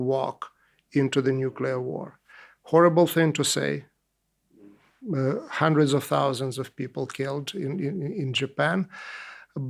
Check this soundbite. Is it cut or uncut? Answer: uncut